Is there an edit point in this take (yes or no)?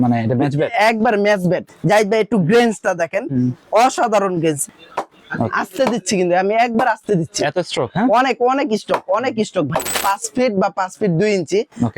yes